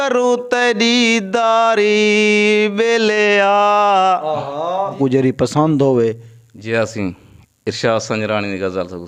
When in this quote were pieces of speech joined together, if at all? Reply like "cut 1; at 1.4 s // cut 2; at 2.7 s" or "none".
cut 1; at 5.0 s